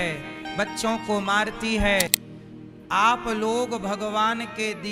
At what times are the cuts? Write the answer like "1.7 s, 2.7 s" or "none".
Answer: 2.2 s